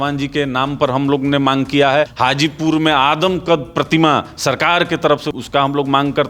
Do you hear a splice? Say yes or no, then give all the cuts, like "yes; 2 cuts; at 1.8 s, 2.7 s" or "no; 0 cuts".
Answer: yes; 2 cuts; at 2.1 s, 5.3 s